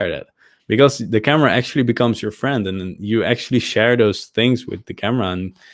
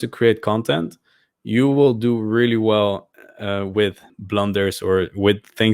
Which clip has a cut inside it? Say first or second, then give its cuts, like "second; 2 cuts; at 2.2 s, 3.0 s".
second; 1 cut; at 4.1 s